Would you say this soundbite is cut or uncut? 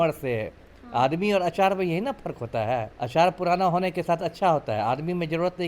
cut